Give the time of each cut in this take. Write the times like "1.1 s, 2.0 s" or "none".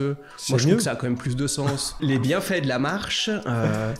2.0 s

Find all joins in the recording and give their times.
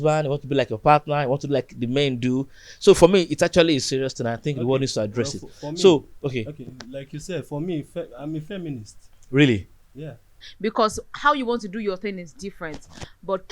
10.5 s

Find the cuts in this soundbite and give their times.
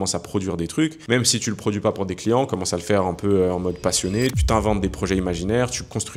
1.0 s, 4.4 s

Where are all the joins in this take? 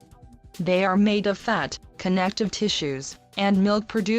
3.1 s

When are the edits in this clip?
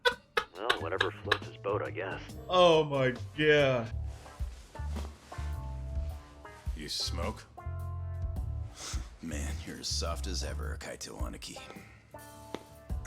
3.9 s

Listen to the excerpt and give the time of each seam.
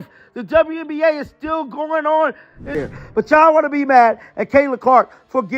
2.8 s

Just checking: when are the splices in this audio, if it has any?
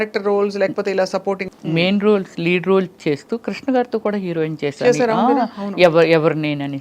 1.5 s

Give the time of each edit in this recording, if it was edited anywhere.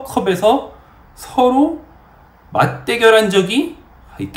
none

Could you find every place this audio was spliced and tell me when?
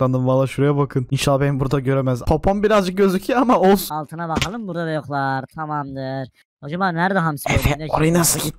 1.1 s, 3.8 s

